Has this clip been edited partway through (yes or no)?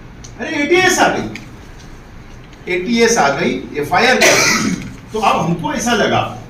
no